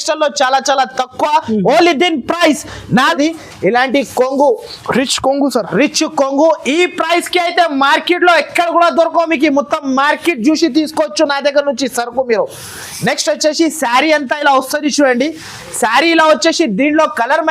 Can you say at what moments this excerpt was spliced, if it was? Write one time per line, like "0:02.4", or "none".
0:03.1